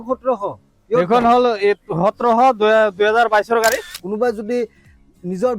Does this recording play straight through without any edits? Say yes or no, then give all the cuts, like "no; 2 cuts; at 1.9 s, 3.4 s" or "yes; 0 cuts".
no; 1 cut; at 3.9 s